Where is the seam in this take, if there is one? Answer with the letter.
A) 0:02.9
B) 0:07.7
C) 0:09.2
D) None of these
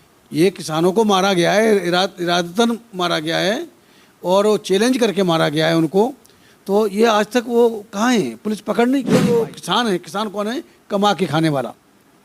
C